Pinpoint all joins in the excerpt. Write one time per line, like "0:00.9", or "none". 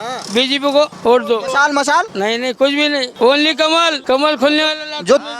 0:01.0
0:02.1
0:03.1
0:04.0